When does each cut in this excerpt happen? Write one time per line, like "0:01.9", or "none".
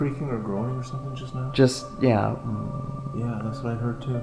none